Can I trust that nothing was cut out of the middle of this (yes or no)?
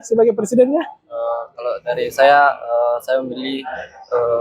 yes